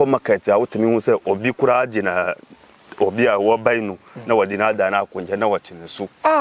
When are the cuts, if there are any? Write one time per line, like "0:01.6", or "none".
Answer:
none

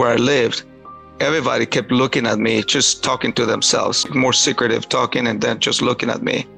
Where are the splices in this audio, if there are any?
none

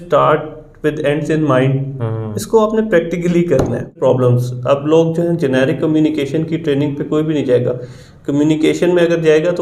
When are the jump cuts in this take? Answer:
0:03.9

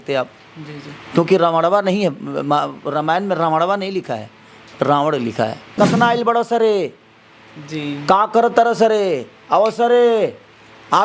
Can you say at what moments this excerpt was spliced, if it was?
0:05.6

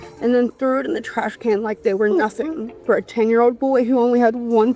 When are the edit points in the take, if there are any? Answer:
none

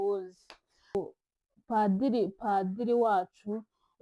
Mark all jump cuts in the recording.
0:01.0

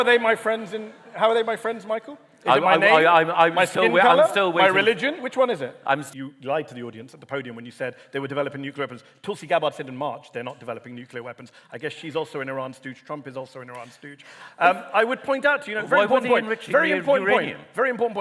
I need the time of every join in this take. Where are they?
0:06.1

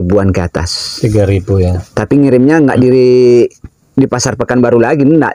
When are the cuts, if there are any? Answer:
none

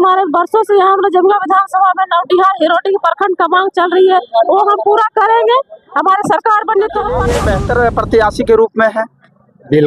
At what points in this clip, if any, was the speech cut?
0:07.3

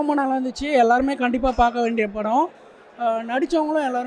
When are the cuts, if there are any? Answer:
none

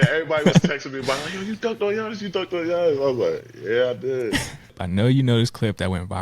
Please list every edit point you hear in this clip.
0:04.8

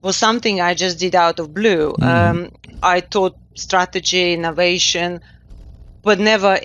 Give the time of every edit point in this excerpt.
none

